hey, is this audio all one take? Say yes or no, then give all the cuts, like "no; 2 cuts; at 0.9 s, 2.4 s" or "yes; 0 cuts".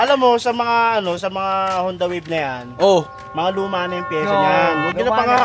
yes; 0 cuts